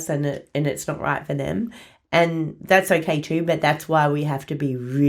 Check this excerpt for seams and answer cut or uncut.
uncut